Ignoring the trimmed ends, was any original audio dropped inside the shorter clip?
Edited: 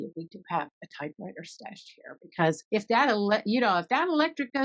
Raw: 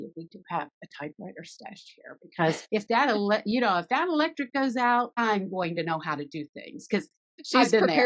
no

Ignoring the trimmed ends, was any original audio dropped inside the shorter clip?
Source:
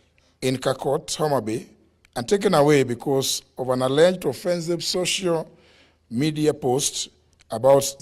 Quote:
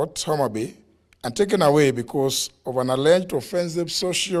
no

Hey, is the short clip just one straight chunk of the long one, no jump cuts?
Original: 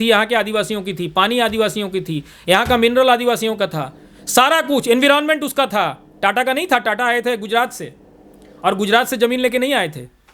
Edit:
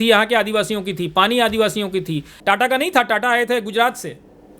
no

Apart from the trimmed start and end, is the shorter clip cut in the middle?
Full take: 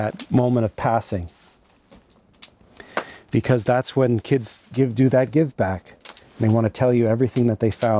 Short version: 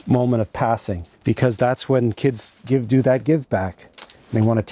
yes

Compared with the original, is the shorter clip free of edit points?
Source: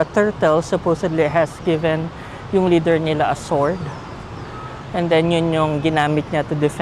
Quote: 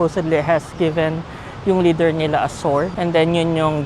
no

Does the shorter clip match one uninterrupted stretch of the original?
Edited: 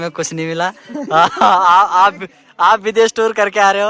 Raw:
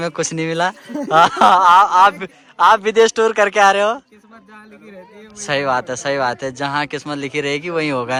yes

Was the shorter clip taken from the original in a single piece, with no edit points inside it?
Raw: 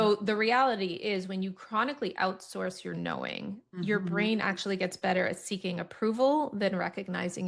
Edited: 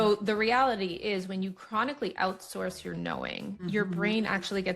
no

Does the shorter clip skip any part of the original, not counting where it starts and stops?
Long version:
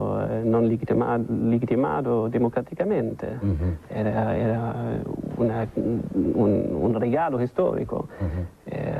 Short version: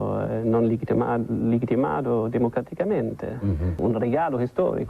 yes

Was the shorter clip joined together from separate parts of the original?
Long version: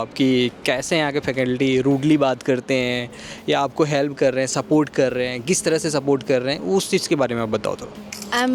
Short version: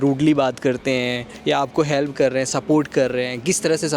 yes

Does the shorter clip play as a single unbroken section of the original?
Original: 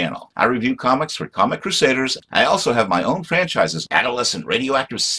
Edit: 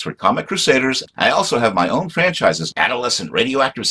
yes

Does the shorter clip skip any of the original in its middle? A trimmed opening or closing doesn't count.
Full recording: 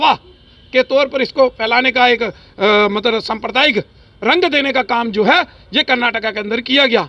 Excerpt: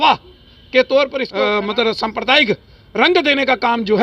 yes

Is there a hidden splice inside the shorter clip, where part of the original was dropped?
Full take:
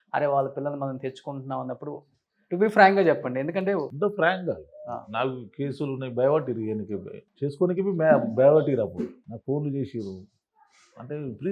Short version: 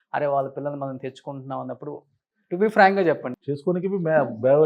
yes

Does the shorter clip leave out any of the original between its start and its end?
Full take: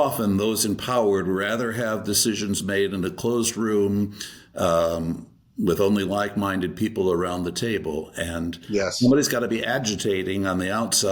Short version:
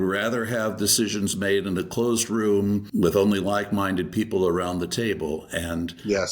yes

